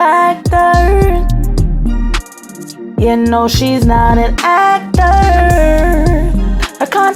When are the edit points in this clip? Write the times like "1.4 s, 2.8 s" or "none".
none